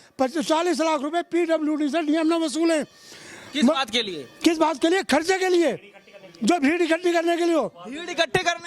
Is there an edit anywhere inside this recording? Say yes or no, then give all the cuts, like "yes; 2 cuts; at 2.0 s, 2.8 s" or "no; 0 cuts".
no; 0 cuts